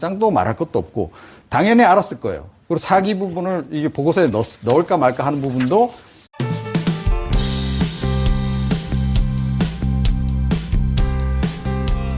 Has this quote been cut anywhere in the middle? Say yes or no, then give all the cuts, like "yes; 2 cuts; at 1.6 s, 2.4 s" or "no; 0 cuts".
no; 0 cuts